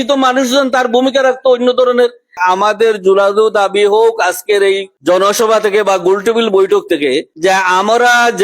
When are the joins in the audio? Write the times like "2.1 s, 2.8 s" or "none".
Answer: 2.4 s, 7.3 s